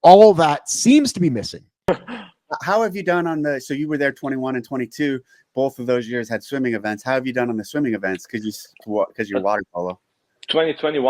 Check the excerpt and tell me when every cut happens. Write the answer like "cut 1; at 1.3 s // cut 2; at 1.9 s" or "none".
cut 1; at 1.7 s